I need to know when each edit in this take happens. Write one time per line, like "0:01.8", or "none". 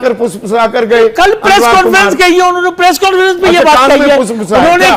none

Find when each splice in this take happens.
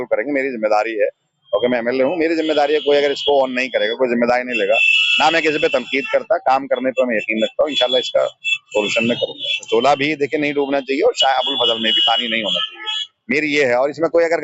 0:09.7

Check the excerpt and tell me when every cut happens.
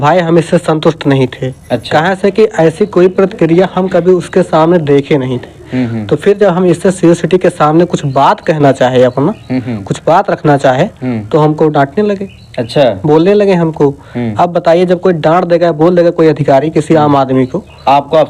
none

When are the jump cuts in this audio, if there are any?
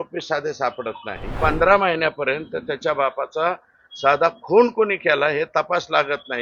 0:01.3

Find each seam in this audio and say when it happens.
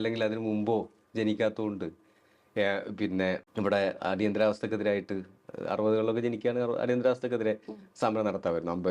0:03.5

